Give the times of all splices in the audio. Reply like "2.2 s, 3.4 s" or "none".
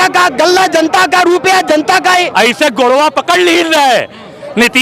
2.3 s